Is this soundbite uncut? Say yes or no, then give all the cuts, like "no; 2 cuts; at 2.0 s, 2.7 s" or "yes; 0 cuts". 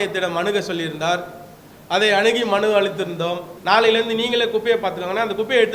no; 1 cut; at 3.5 s